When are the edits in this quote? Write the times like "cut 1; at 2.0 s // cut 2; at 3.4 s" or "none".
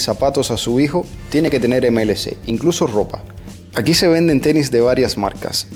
none

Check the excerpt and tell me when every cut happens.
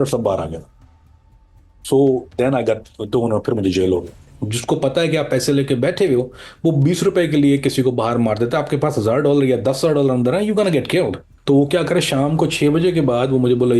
cut 1; at 4.2 s

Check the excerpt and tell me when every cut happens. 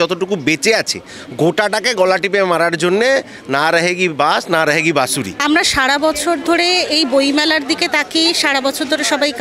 cut 1; at 5.3 s

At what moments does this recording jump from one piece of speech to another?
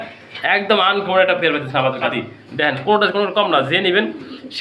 cut 1; at 2.1 s

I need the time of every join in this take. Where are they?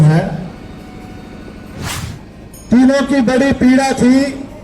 cut 1; at 1.9 s

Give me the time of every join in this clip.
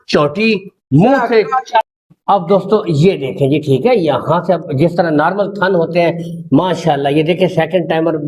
cut 1; at 1.9 s

